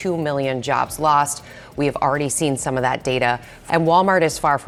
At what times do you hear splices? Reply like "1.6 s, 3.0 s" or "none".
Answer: none